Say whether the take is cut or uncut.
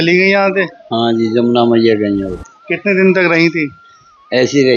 uncut